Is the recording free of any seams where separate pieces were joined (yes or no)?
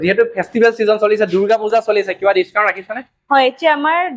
yes